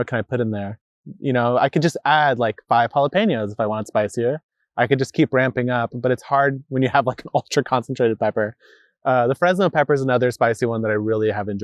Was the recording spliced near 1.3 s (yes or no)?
no